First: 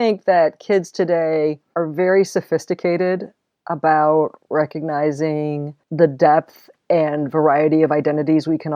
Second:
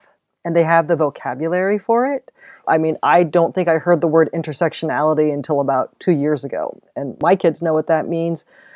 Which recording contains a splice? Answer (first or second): first